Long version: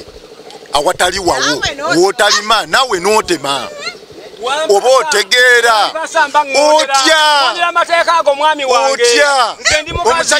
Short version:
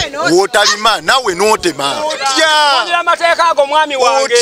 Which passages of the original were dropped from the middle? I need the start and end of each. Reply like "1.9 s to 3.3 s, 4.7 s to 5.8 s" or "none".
3.9 s to 6.9 s